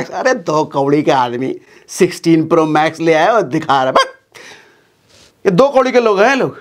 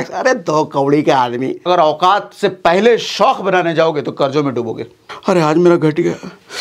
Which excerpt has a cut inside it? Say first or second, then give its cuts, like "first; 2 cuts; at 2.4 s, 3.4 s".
second; 2 cuts; at 1.7 s, 5.1 s